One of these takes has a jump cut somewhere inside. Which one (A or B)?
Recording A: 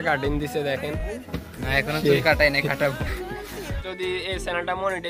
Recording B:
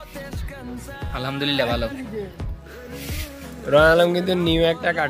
A